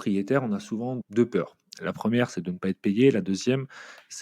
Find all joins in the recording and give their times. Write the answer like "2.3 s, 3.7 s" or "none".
1.0 s